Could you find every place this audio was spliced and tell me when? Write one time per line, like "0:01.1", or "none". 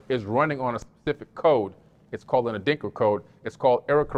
none